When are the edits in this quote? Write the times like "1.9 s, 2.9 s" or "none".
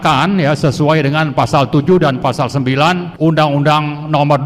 3.1 s